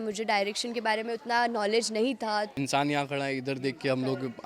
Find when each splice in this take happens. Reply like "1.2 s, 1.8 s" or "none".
2.5 s